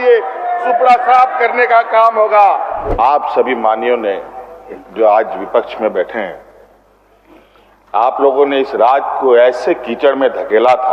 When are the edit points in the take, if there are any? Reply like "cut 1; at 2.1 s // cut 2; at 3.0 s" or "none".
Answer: cut 1; at 2.8 s